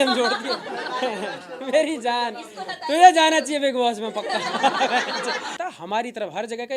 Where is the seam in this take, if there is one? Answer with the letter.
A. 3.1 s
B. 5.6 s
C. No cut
B